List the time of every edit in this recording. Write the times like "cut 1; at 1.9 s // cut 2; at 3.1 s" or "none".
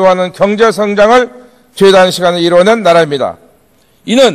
cut 1; at 2.6 s